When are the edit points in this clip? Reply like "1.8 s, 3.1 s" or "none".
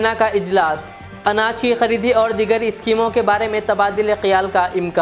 none